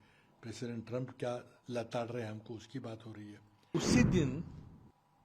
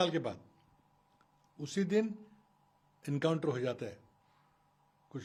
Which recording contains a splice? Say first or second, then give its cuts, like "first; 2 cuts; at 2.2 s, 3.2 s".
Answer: first; 1 cut; at 3.7 s